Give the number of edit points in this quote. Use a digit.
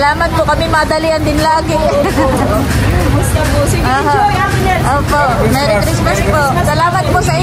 0